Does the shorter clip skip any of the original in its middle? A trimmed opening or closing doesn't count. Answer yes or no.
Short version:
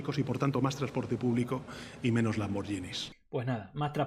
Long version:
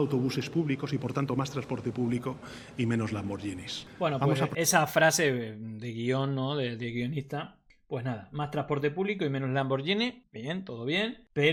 yes